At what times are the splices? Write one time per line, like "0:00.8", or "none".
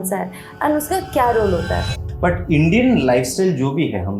0:01.9